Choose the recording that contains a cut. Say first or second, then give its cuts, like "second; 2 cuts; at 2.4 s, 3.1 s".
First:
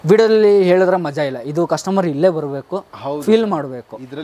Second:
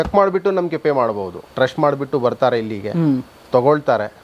second; 1 cut; at 1.4 s